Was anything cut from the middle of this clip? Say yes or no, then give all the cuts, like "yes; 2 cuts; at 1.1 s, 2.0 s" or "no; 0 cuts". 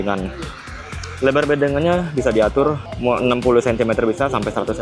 yes; 1 cut; at 2.9 s